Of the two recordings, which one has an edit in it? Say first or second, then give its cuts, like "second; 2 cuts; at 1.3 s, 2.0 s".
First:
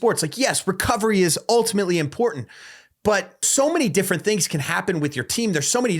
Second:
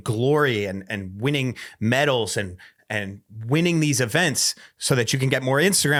first; 1 cut; at 3.5 s